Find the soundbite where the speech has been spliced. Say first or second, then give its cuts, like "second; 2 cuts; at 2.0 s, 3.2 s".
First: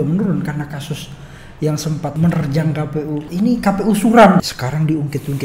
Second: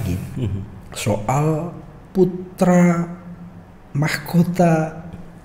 first; 3 cuts; at 2.1 s, 3.3 s, 4.4 s